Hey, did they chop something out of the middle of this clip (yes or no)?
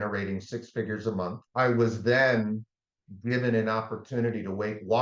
yes